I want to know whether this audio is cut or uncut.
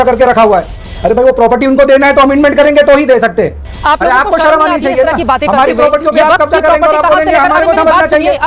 cut